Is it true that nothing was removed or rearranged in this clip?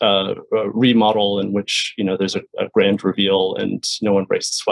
yes; 0 cuts

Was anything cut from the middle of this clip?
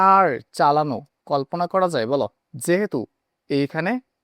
yes; 1 cut; at 2.5 s

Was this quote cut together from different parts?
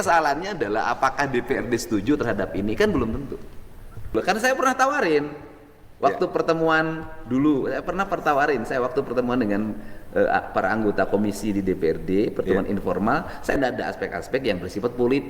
yes; 2 cuts; at 4.1 s, 13.6 s

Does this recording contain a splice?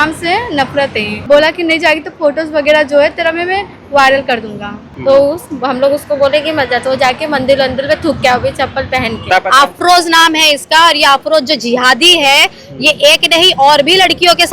yes; 3 cuts; at 1.1 s, 4.8 s, 9.3 s

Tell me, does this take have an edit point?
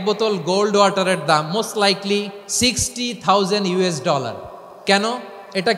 yes; 2 cuts; at 2.4 s, 4.7 s

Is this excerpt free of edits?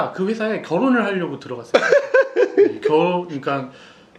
yes; 0 cuts

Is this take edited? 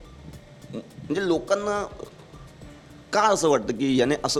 no; 0 cuts

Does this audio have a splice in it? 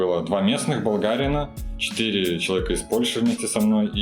no; 0 cuts

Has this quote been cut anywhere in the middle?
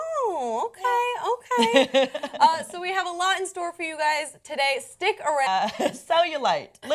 no; 0 cuts

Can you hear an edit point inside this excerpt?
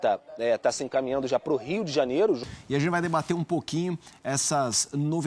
yes; 1 cut; at 2.4 s

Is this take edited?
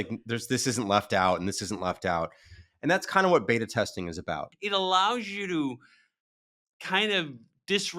yes; 1 cut; at 4.5 s

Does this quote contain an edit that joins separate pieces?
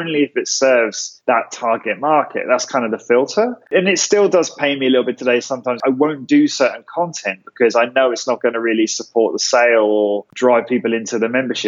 yes; 1 cut; at 10.3 s

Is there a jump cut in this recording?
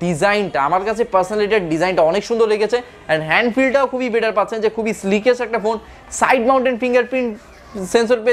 no; 0 cuts

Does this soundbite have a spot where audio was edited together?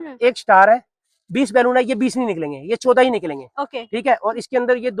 no; 0 cuts

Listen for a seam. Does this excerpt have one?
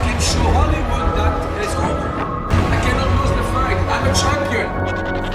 no; 0 cuts

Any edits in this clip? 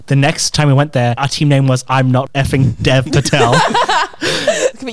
no; 0 cuts

